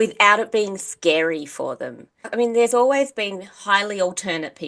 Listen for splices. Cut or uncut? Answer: cut